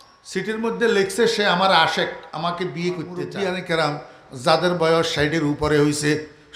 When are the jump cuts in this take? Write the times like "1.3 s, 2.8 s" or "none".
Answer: 3.6 s